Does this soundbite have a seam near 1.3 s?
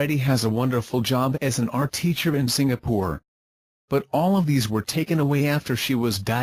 yes; 2 cuts; at 1.3 s, 5.2 s

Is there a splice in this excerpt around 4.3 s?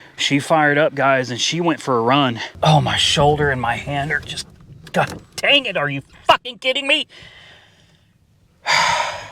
no; 1 cut; at 2.4 s

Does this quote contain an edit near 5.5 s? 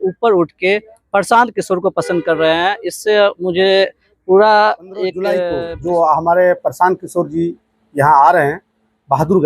yes; 1 cut; at 5.5 s

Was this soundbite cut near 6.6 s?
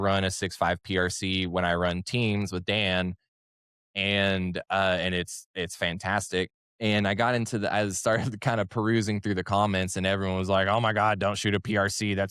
yes; 1 cut; at 6.6 s

